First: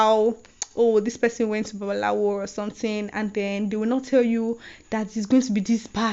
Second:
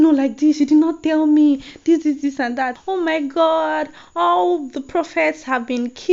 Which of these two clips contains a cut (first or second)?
second